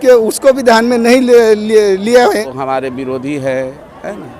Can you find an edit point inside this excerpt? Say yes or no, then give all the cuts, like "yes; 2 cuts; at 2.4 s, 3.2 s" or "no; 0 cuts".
yes; 1 cut; at 2.5 s